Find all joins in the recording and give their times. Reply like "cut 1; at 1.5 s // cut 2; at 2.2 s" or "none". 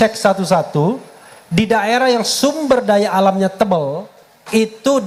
none